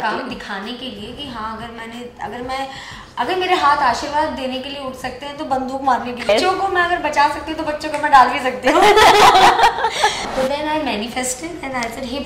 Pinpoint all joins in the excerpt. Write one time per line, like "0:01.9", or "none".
0:06.3
0:10.2